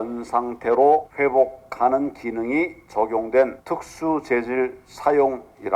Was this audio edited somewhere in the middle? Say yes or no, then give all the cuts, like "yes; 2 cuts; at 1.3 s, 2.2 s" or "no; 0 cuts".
yes; 3 cuts; at 1.1 s, 2.8 s, 3.6 s